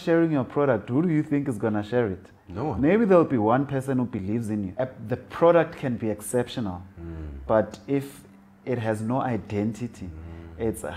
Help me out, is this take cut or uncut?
cut